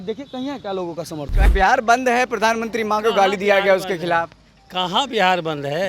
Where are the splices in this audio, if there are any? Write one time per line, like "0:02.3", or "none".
0:01.5